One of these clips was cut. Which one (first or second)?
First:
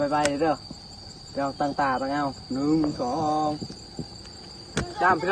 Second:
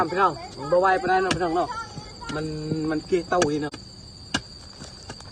second